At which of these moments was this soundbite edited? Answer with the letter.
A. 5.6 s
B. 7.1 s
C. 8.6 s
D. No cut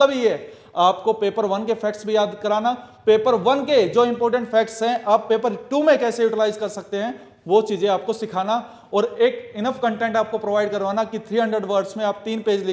D